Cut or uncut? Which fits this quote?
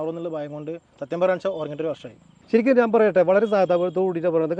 uncut